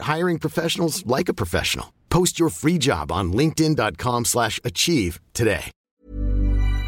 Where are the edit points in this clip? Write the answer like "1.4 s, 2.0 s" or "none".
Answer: 5.7 s